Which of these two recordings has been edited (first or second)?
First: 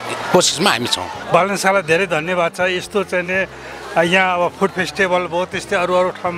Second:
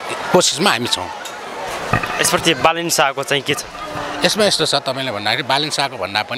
first